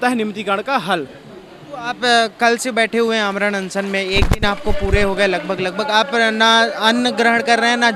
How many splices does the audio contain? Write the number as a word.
zero